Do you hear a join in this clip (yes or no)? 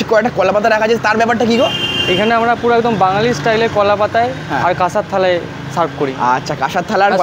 no